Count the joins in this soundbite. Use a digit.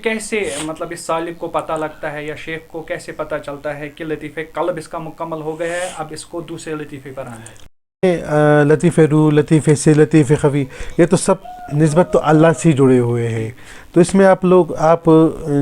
1